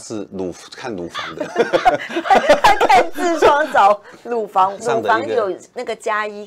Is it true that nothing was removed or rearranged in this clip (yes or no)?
no